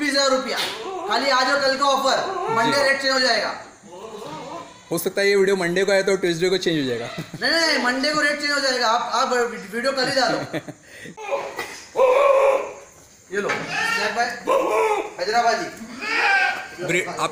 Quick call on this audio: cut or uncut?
uncut